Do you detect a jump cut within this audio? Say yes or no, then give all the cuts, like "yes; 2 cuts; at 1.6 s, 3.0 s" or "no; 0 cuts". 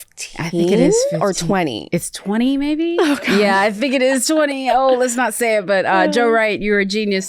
yes; 1 cut; at 3.3 s